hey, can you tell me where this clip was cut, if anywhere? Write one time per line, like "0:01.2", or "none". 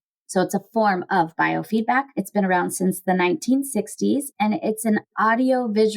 0:02.2